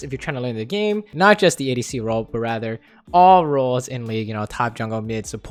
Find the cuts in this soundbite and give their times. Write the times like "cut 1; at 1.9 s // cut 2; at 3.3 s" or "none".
none